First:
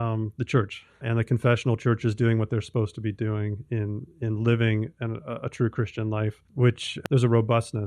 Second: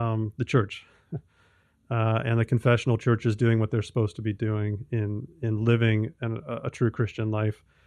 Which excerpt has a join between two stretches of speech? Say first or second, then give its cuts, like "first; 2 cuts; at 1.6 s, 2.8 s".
first; 2 cuts; at 1.0 s, 6.9 s